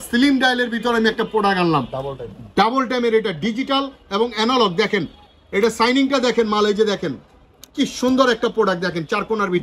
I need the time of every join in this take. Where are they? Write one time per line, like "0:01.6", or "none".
none